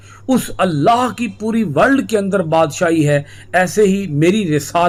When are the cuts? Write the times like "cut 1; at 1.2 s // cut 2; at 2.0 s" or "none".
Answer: none